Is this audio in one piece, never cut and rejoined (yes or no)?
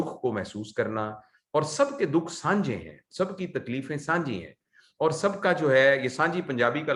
yes